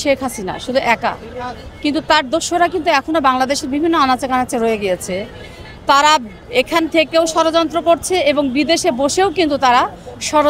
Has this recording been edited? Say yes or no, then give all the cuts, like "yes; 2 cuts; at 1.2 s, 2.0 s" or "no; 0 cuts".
no; 0 cuts